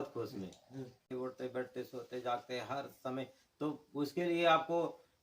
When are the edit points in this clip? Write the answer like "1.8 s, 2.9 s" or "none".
1.0 s

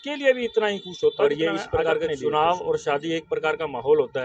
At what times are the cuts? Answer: 1.9 s

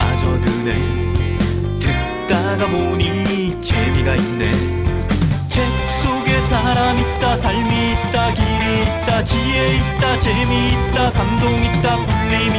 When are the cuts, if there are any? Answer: none

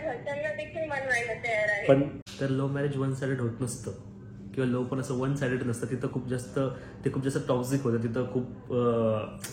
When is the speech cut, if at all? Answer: 2.2 s

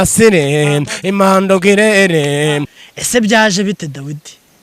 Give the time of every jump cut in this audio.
2.7 s

